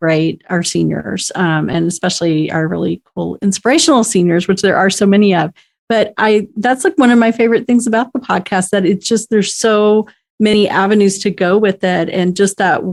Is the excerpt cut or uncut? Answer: uncut